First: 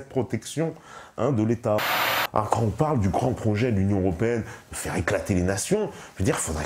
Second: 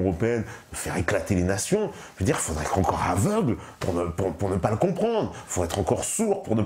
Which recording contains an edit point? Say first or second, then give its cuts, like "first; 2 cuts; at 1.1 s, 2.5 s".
first; 1 cut; at 2.0 s